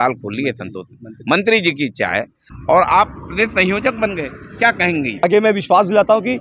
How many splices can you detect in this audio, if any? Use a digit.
2